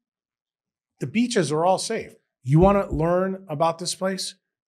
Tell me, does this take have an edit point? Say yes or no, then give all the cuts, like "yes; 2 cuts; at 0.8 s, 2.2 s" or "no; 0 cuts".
yes; 1 cut; at 2.1 s